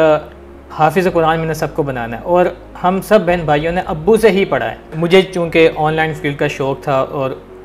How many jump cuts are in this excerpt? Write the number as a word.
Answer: one